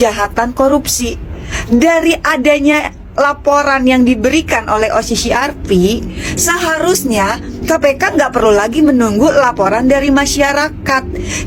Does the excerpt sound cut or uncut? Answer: uncut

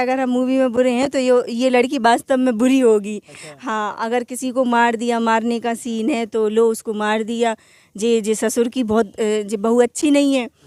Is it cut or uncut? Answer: uncut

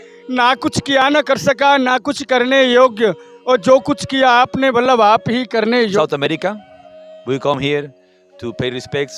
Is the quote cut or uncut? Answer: cut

